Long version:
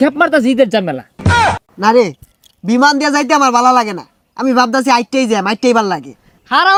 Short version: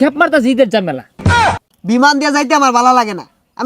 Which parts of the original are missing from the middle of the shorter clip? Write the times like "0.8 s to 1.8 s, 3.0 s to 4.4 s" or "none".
1.3 s to 2.1 s